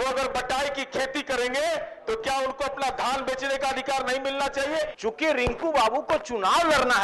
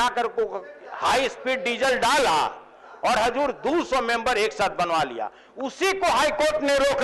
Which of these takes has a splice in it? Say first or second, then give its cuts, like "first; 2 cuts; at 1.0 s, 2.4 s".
first; 2 cuts; at 2.9 s, 4.9 s